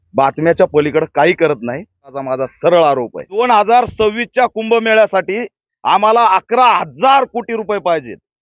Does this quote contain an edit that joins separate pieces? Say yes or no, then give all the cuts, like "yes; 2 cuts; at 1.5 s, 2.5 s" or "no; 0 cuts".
yes; 2 cuts; at 2.1 s, 3.4 s